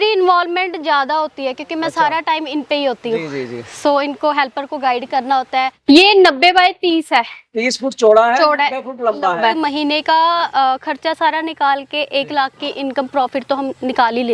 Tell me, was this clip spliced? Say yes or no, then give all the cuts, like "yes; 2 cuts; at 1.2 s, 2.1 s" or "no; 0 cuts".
yes; 2 cuts; at 5.7 s, 9.6 s